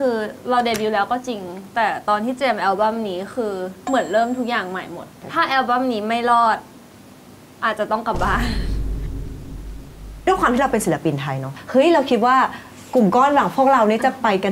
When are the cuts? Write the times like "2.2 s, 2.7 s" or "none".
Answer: 10.2 s, 11.5 s